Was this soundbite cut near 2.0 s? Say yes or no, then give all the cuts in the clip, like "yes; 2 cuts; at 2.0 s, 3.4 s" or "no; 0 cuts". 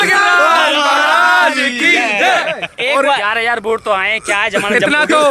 no; 1 cut; at 3.3 s